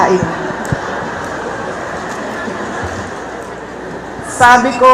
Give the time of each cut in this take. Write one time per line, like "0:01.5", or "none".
0:03.5